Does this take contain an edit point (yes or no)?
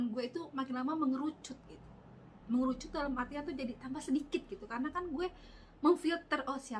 no